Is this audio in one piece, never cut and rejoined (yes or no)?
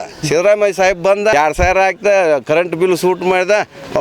no